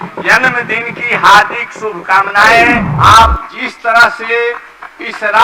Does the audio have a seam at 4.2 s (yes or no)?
no